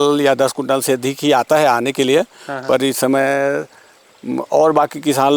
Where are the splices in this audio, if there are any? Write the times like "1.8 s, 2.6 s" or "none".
none